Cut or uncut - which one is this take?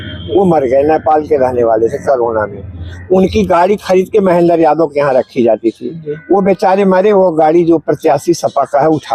uncut